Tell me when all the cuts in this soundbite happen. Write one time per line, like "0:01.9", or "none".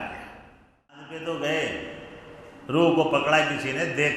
0:01.1